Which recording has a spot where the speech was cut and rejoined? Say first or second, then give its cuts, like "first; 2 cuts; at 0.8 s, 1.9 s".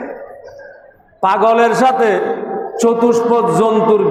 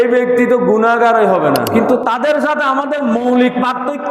second; 1 cut; at 1.7 s